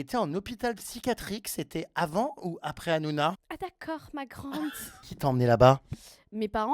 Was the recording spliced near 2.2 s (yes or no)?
no